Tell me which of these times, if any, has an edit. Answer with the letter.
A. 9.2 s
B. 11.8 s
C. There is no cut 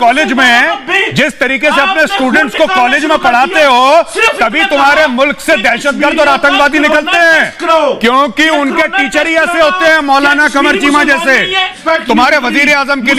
B